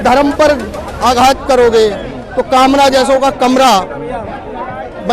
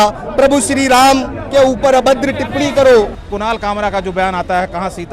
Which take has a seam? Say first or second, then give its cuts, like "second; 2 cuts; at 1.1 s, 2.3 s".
second; 1 cut; at 3.2 s